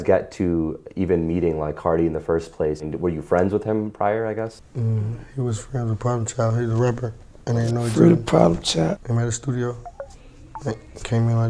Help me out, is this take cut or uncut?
cut